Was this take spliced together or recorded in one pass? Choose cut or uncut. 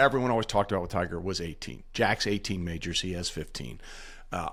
uncut